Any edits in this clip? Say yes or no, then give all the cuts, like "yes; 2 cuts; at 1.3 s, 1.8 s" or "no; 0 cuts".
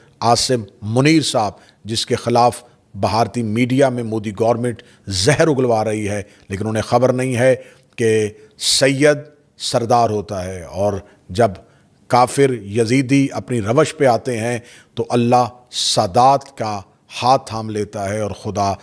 no; 0 cuts